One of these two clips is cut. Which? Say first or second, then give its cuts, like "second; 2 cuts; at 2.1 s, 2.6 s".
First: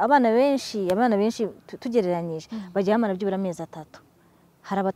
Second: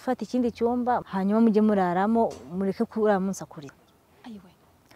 second; 2 cuts; at 1.1 s, 3.7 s